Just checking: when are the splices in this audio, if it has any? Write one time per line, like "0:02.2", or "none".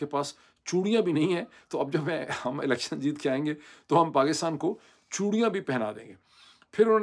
none